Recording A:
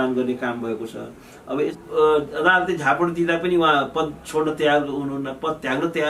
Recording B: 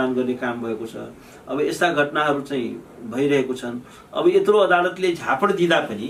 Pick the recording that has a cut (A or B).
A